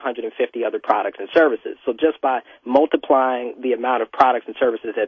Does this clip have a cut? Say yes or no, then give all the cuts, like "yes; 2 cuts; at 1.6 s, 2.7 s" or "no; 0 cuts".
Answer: no; 0 cuts